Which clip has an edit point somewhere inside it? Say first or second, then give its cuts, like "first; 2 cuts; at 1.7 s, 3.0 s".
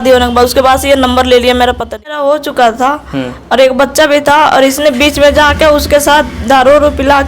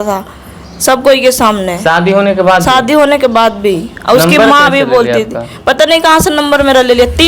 first; 1 cut; at 2.1 s